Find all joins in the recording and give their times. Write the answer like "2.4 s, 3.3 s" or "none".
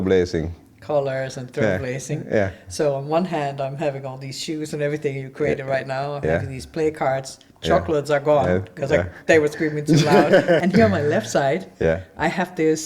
10.6 s